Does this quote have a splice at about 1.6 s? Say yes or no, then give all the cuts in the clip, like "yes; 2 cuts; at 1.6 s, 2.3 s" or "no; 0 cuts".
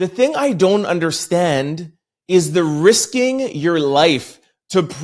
no; 0 cuts